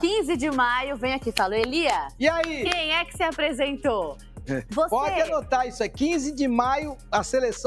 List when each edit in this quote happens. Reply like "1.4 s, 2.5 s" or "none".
none